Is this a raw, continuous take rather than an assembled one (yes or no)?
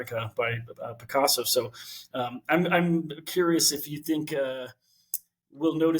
yes